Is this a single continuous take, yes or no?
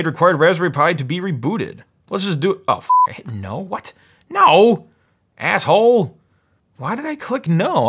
yes